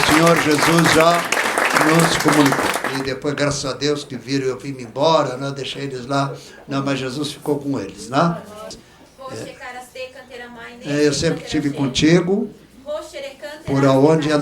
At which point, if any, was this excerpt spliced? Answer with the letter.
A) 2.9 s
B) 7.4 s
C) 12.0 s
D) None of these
A